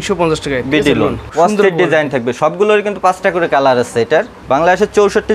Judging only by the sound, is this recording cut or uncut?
cut